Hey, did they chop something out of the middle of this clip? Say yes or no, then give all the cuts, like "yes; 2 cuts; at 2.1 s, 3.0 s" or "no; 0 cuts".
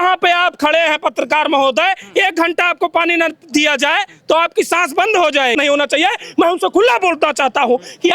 yes; 1 cut; at 5.6 s